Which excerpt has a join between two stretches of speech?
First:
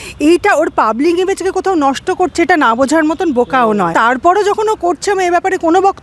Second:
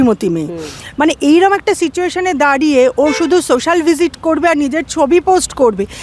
first; 1 cut; at 3.9 s

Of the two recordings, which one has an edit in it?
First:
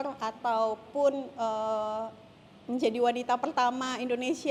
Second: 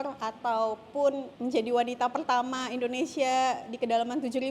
second; 1 cut; at 1.3 s

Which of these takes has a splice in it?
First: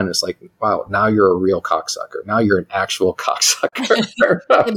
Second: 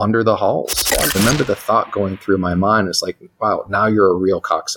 second; 1 cut; at 1.1 s

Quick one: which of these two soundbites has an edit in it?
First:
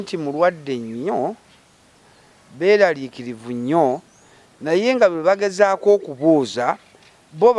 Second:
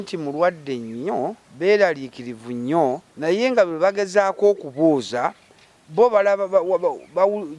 second; 2 cuts; at 1.5 s, 3.1 s

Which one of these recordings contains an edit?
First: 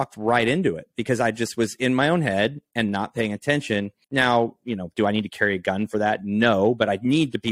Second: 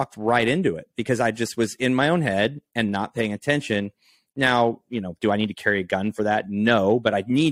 first; 1 cut; at 4.0 s

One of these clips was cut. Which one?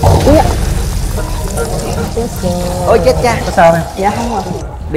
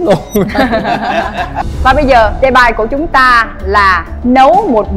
second; 1 cut; at 1.6 s

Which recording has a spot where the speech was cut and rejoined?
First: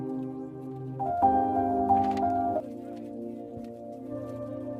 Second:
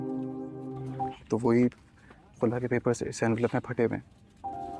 second; 1 cut; at 1.0 s

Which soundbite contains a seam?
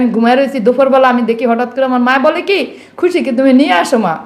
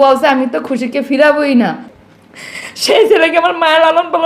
second; 1 cut; at 1.9 s

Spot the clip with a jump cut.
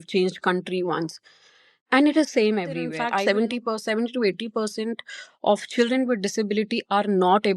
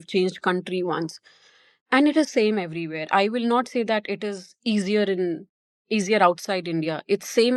first; 1 cut; at 3.0 s

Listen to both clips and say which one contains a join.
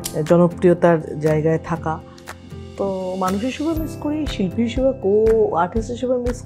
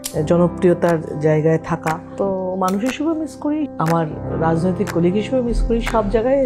second; 2 cuts; at 2.1 s, 3.7 s

